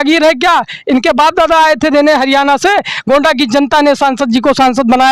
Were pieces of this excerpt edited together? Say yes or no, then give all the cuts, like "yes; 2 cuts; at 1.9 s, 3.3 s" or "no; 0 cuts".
no; 0 cuts